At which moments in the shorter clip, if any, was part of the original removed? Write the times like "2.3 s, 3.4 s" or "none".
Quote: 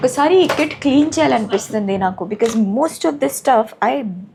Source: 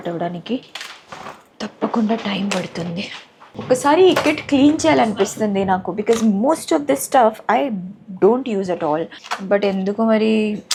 none